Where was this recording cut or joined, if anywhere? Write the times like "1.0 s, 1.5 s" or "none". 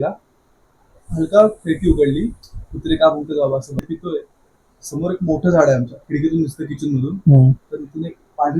3.9 s